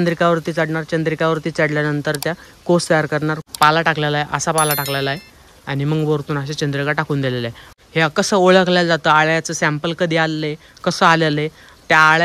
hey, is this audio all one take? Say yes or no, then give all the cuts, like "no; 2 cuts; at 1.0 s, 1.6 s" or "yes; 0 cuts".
no; 2 cuts; at 3.4 s, 7.7 s